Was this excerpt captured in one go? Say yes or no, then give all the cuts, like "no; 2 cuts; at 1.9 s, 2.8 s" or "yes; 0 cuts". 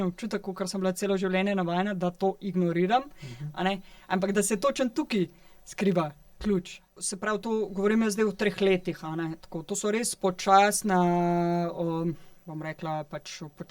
no; 1 cut; at 7.1 s